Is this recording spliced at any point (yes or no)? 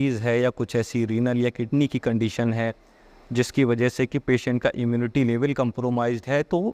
no